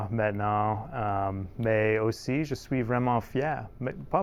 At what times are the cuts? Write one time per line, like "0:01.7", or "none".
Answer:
none